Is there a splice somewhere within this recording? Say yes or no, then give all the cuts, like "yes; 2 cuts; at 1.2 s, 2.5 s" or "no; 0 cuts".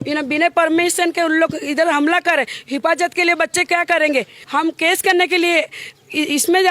yes; 1 cut; at 4.4 s